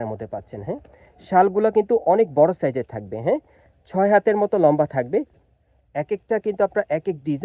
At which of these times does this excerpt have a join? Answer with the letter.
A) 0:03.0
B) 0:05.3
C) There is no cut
B